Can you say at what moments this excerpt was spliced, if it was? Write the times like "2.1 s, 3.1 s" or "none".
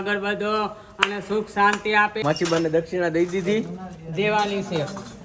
2.2 s